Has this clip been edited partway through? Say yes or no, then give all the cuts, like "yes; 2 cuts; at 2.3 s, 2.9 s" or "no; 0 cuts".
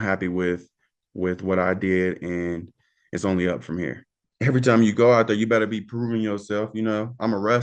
yes; 1 cut; at 4.3 s